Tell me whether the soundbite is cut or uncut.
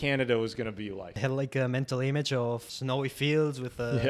cut